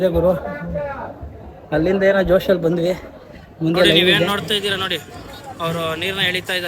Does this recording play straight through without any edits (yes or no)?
no